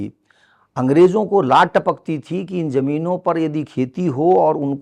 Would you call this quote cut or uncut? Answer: uncut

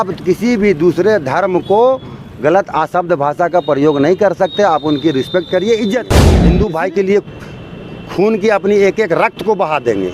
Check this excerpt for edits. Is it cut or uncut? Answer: cut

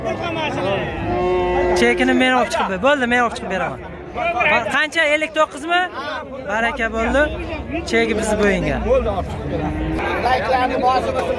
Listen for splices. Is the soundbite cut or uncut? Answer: cut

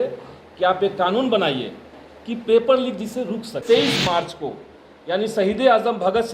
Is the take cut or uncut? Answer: cut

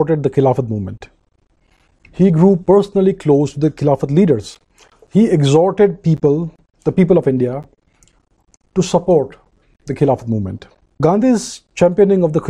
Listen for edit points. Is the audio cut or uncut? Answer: cut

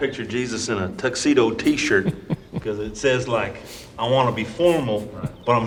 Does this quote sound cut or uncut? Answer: uncut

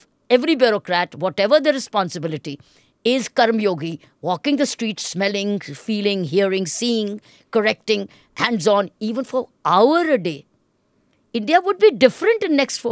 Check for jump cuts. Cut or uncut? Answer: uncut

